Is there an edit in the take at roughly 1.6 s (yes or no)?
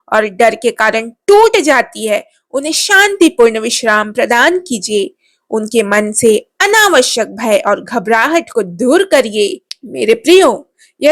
no